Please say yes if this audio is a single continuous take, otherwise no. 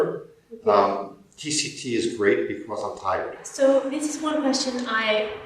no